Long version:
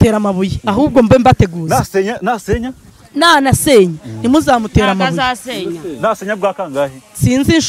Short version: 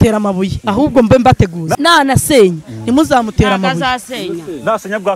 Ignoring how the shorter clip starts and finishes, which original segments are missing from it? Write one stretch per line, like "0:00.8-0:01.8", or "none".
0:01.7-0:03.1